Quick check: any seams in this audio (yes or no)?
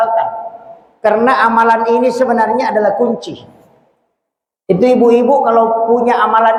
no